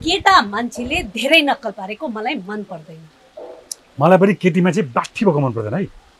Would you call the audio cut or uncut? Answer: uncut